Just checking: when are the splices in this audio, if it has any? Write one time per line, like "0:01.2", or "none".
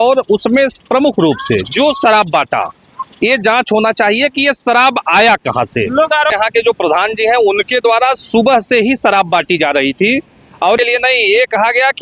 0:06.3
0:10.8